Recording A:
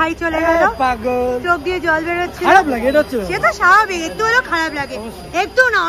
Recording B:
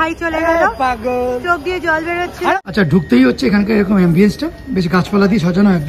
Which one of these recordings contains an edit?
B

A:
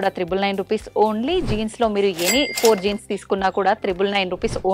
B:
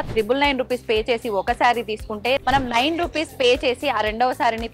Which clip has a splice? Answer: B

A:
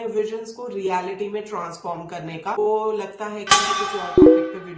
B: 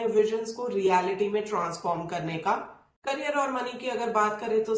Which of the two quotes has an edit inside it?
A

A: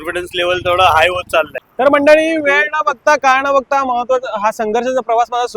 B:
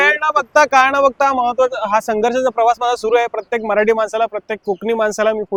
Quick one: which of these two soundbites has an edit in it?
A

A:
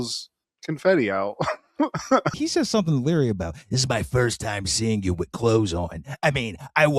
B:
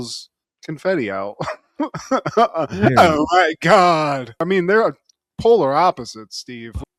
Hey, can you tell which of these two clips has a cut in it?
A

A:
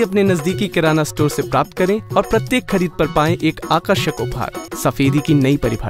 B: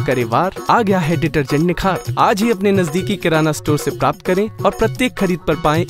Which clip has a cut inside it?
A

